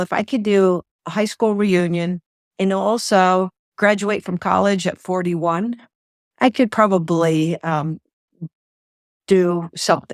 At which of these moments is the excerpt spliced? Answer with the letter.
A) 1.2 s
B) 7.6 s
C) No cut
C